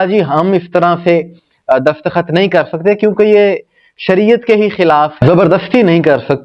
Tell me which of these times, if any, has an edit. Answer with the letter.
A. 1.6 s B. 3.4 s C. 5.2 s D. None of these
C